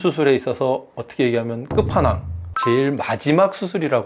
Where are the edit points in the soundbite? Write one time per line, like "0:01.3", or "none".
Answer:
none